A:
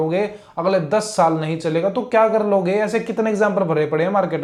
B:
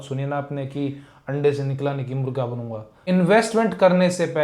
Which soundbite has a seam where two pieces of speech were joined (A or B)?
B